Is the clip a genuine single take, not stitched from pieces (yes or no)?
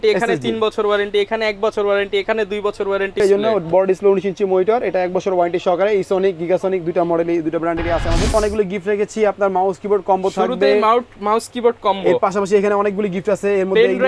no